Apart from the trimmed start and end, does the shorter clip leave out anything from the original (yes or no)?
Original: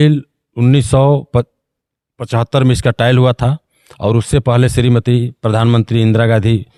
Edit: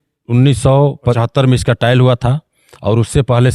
yes